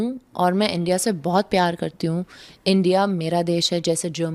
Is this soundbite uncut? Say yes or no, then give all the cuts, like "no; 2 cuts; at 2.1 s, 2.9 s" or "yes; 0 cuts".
yes; 0 cuts